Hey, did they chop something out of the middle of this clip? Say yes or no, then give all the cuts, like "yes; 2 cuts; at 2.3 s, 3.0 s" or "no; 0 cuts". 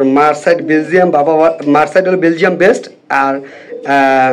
no; 0 cuts